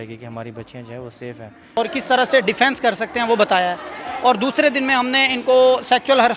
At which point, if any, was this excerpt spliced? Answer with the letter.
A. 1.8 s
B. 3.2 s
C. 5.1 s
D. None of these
A